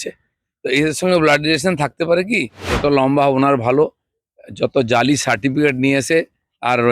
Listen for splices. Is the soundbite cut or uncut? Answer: cut